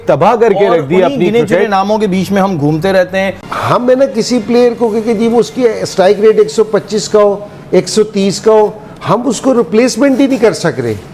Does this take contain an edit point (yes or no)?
no